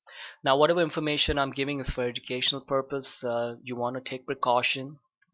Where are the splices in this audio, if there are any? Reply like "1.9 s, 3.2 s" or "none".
1.8 s